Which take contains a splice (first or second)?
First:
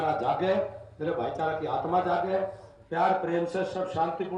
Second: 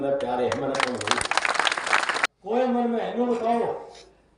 second